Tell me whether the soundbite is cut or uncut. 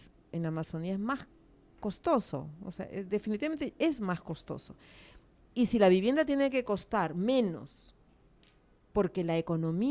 uncut